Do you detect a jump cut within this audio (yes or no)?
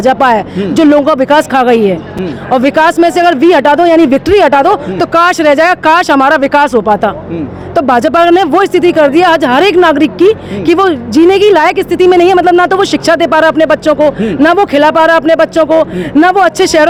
no